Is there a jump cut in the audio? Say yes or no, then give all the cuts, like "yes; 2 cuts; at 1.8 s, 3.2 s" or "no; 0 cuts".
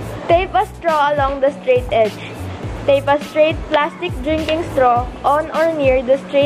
no; 0 cuts